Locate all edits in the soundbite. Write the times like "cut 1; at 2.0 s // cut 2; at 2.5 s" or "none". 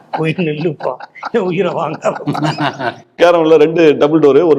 cut 1; at 3.0 s